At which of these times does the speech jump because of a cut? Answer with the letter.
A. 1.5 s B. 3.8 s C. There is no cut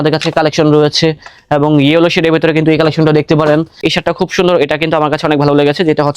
B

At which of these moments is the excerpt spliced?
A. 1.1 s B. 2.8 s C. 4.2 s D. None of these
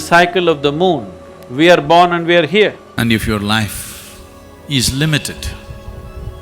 B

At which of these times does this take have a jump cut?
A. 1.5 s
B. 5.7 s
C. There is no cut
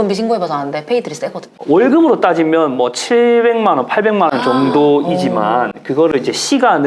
C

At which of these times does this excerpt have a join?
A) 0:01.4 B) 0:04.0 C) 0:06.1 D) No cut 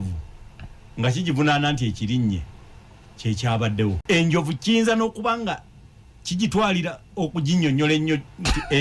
B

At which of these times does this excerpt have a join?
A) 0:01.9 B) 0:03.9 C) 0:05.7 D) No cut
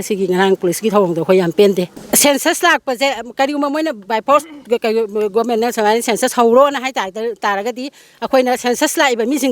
A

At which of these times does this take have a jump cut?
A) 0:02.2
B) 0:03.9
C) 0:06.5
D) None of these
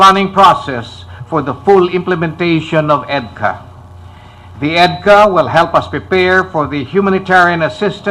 A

